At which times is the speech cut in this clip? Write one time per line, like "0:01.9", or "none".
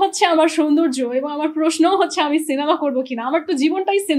none